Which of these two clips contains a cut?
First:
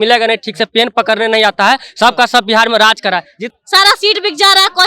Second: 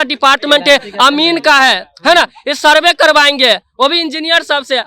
first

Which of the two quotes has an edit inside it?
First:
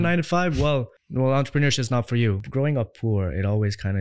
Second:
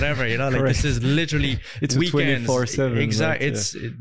first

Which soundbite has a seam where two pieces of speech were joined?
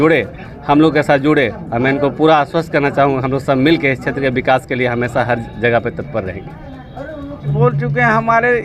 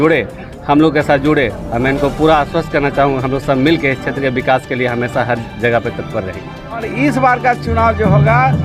second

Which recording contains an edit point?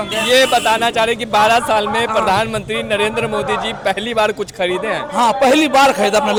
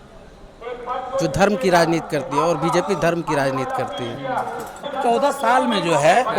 second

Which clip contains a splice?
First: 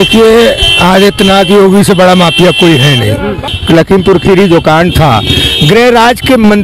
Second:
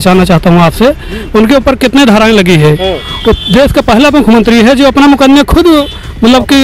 first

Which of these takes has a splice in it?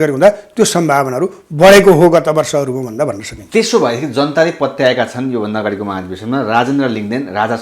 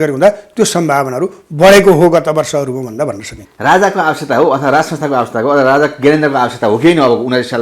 second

